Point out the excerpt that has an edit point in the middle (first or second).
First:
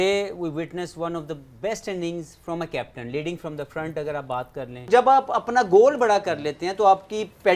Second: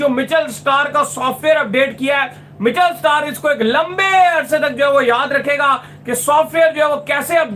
first